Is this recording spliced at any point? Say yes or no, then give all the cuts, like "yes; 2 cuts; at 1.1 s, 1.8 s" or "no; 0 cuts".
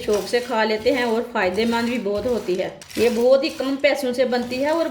no; 0 cuts